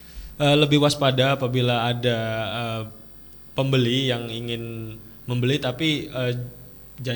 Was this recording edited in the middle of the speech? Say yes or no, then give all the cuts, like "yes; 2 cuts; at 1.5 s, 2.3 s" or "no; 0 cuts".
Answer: no; 0 cuts